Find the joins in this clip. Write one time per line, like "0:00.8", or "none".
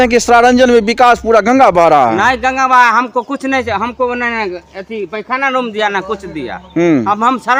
none